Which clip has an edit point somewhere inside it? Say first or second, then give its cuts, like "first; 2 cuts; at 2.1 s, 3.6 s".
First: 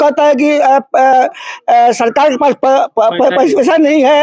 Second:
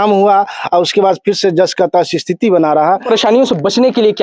second; 1 cut; at 3.0 s